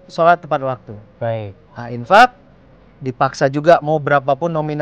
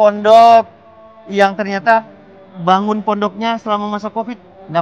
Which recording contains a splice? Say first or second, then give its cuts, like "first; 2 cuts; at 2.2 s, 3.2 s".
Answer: first; 1 cut; at 1.6 s